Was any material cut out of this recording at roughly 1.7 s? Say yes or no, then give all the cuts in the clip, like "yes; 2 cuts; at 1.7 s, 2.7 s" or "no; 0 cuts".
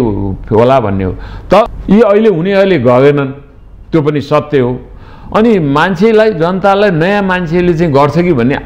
yes; 1 cut; at 1.7 s